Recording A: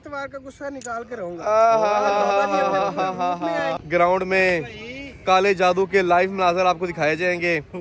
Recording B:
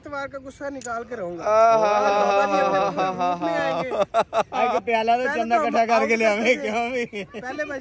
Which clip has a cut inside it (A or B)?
A